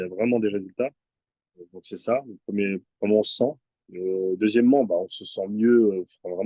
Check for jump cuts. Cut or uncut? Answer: uncut